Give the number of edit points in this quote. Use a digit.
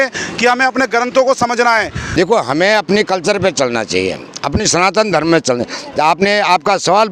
1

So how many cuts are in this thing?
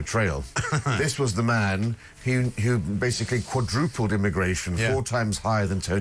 0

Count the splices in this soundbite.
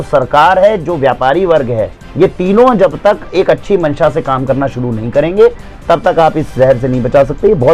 0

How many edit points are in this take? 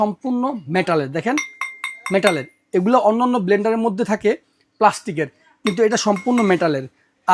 0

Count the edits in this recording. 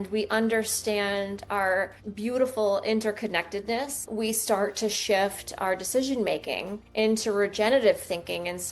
3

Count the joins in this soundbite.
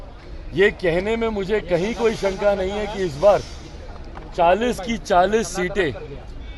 0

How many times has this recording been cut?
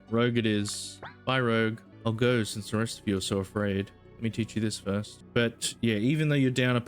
2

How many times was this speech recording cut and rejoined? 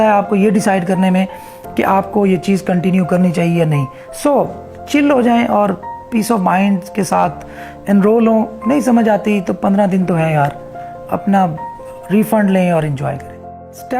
0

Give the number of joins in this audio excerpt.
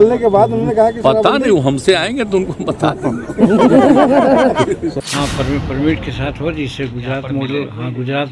1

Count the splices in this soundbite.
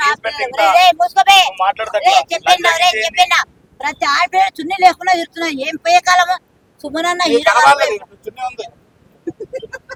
0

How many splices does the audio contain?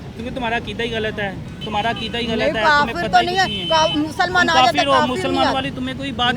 0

